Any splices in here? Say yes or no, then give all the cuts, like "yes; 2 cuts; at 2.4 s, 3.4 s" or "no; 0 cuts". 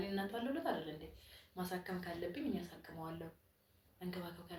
no; 0 cuts